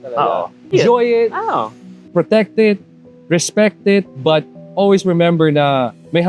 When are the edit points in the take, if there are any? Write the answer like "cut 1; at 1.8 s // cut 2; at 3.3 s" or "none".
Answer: cut 1; at 0.7 s // cut 2; at 2.1 s